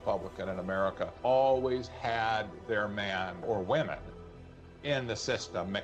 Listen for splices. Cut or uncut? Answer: cut